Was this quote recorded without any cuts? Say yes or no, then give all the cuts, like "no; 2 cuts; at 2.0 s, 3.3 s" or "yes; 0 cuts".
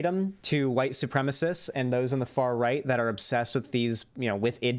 yes; 0 cuts